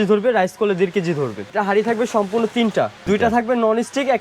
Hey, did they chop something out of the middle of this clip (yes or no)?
yes